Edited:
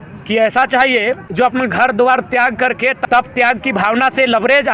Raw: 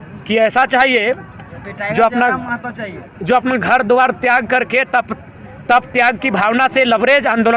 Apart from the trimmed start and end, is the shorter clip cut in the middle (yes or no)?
yes